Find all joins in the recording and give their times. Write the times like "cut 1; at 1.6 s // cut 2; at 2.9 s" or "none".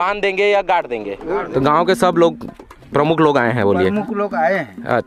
cut 1; at 1.5 s